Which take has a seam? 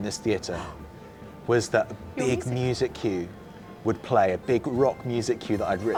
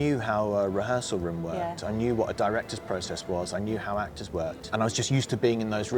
second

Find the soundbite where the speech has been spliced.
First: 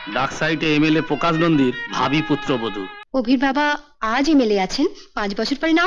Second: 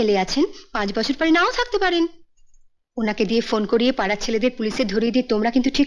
first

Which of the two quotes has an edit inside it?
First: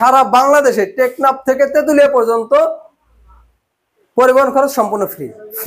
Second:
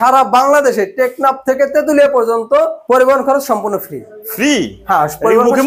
second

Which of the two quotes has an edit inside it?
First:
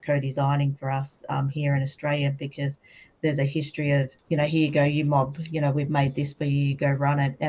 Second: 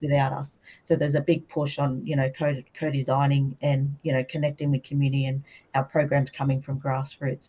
first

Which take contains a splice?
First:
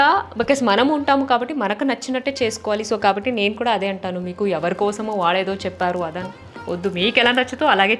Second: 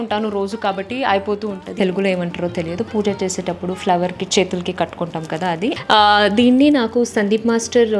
second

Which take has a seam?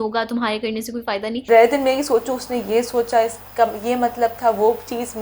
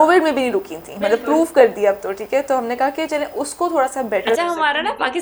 first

